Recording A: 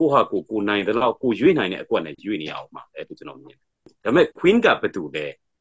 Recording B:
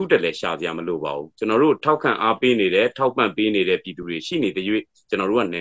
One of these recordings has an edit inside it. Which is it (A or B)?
A